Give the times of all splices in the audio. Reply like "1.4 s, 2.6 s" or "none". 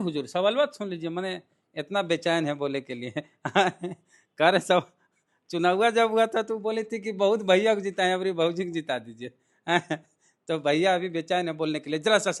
none